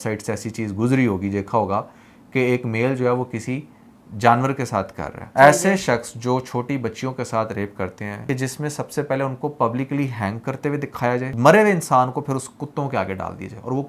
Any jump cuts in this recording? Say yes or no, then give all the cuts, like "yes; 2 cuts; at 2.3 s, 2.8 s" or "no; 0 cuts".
yes; 3 cuts; at 5.3 s, 8.1 s, 11.3 s